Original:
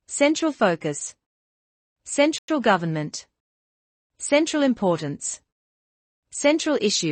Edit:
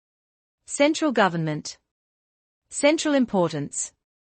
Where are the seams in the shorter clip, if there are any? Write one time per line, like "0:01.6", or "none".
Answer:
0:01.0